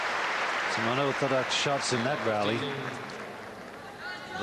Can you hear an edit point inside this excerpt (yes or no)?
yes